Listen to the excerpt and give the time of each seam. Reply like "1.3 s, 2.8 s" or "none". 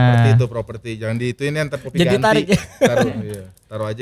none